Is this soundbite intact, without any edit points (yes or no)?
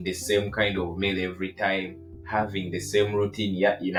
yes